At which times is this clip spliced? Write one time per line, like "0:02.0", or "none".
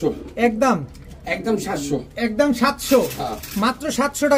none